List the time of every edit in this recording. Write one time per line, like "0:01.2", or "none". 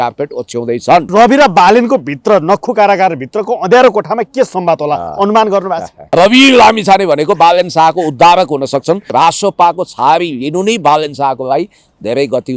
0:01.1
0:05.9